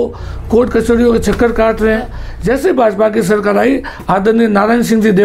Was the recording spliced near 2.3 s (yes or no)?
yes